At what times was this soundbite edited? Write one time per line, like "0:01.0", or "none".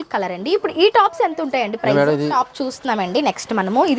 0:02.3